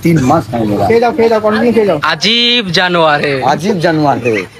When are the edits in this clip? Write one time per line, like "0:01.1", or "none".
none